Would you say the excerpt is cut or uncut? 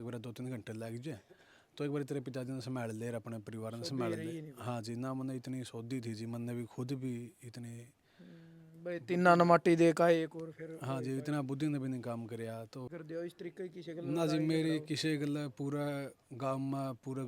cut